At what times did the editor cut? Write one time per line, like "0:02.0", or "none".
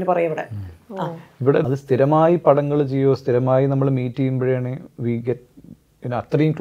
0:01.6